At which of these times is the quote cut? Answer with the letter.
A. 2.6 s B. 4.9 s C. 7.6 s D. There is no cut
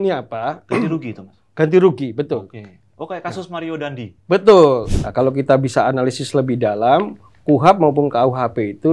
B